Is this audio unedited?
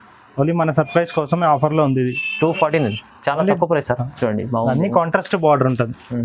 no; 1 cut; at 4.1 s

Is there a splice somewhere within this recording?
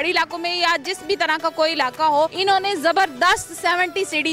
yes; 1 cut; at 2.4 s

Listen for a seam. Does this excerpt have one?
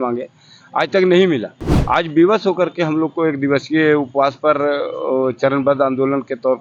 no; 0 cuts

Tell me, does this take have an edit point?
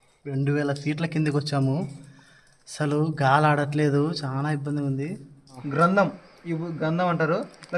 yes; 1 cut; at 5.6 s

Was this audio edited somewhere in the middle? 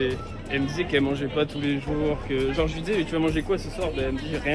no; 0 cuts

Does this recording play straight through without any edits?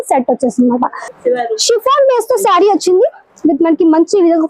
no; 1 cut; at 1.0 s

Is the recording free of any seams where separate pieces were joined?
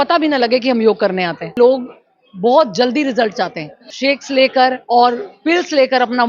no; 2 cuts; at 1.5 s, 3.9 s

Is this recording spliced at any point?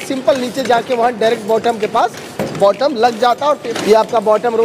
yes; 1 cut; at 3.7 s

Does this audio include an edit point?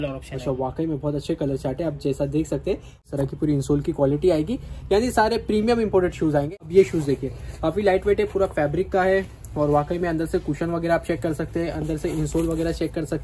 yes; 2 cuts; at 3.1 s, 6.6 s

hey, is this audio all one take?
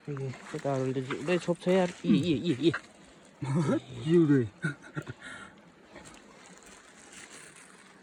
yes; 0 cuts

